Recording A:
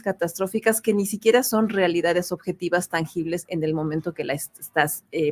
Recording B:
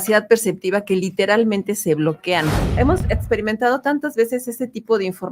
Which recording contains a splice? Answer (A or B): B